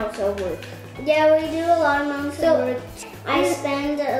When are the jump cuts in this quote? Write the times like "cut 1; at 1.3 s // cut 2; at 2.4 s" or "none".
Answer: cut 1; at 3.0 s